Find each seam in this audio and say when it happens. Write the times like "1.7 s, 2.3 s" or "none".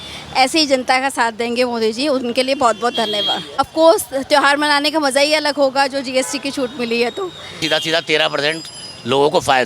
3.4 s, 7.6 s

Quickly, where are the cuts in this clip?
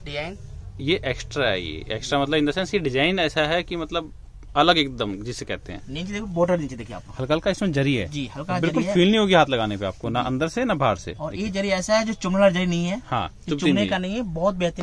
none

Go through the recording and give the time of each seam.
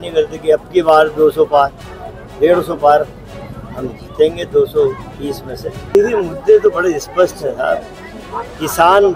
6.0 s

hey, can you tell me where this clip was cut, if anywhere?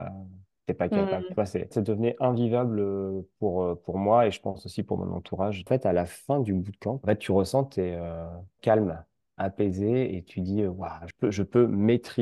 1.8 s, 5.7 s, 7.0 s, 8.6 s, 11.1 s

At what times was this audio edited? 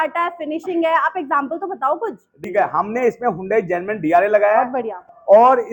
2.4 s

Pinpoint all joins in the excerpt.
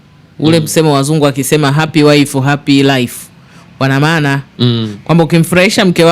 none

